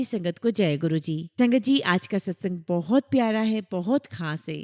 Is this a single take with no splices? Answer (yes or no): yes